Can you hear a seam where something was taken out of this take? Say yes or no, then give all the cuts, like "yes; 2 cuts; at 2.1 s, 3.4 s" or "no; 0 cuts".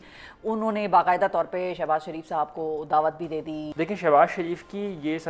yes; 1 cut; at 3.6 s